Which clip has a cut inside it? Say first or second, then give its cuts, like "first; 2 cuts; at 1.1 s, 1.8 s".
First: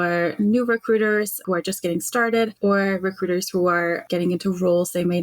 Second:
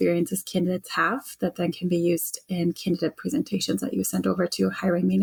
first; 3 cuts; at 1.4 s, 2.5 s, 4.0 s